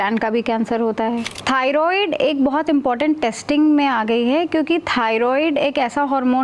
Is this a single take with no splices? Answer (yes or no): no